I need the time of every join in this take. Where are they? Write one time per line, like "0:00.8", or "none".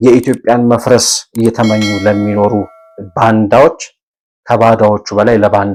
none